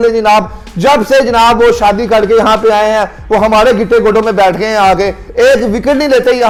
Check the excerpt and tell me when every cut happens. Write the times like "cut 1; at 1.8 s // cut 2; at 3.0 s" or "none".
none